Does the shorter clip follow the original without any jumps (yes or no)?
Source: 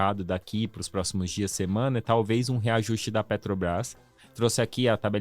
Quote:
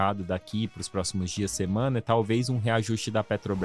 yes